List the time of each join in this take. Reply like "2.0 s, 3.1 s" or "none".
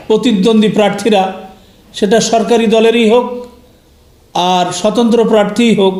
none